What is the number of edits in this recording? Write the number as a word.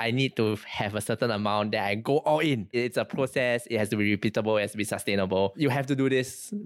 one